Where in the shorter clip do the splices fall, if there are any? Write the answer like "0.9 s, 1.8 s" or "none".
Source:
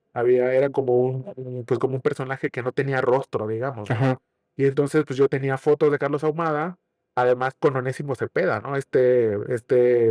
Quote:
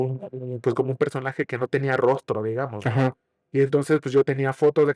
none